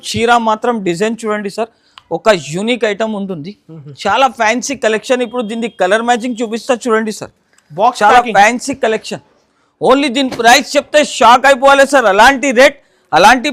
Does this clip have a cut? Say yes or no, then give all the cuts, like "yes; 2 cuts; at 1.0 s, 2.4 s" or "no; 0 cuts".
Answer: no; 0 cuts